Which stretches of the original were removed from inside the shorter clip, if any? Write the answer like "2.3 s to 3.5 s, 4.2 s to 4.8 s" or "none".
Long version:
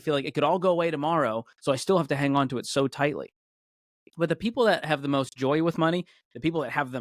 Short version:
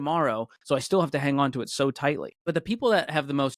3.3 s to 4.1 s